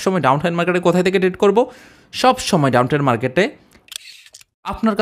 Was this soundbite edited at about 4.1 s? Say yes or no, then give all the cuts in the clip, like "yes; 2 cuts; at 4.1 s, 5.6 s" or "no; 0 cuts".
yes; 1 cut; at 4.1 s